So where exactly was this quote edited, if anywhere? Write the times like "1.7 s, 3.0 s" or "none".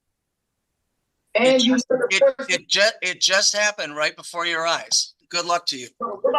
5.2 s

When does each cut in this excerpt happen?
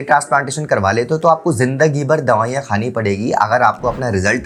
none

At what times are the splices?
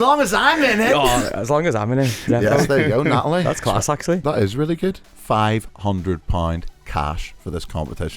5.1 s

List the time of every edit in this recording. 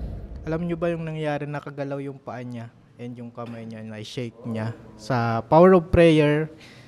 none

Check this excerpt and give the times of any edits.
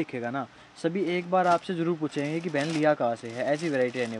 none

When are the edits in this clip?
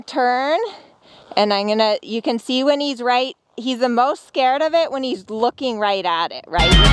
none

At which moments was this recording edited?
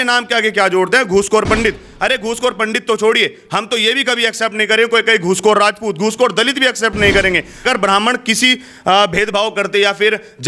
7.6 s

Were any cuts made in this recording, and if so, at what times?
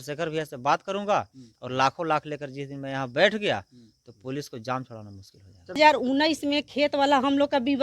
5.8 s

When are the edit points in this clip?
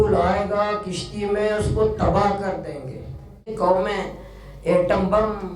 3.5 s

